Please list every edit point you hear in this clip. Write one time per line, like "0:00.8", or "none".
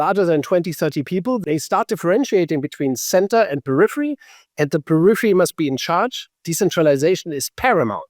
0:01.4